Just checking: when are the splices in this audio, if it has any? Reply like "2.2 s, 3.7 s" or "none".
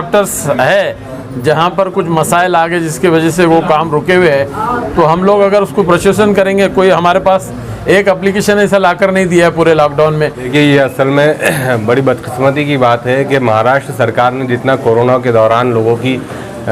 10.5 s